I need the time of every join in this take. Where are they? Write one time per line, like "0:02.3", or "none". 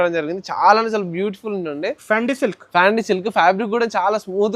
none